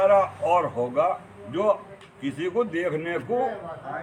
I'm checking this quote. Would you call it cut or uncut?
uncut